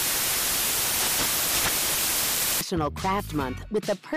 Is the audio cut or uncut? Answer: uncut